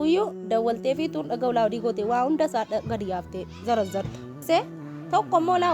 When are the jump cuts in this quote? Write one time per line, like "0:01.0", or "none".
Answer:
0:04.4